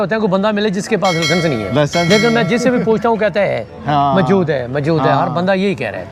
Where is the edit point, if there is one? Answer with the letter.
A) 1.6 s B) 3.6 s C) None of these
C